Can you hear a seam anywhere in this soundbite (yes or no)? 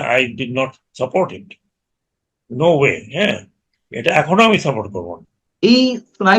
yes